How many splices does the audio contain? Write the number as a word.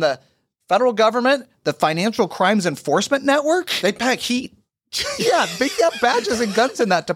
zero